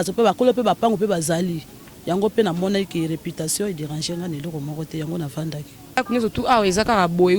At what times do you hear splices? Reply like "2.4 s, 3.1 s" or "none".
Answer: 6.0 s